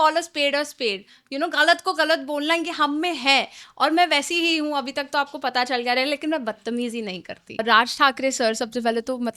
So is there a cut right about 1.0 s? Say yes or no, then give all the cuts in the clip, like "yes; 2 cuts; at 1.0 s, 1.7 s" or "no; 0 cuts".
no; 1 cut; at 7.6 s